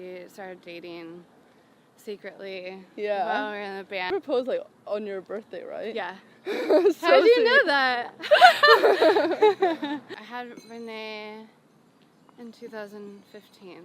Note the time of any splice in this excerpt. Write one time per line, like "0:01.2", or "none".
0:04.1
0:10.1